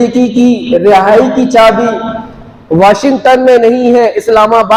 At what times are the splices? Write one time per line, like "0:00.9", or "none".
none

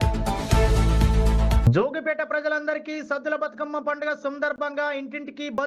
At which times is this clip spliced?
0:01.6

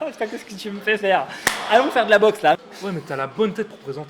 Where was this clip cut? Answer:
0:02.6

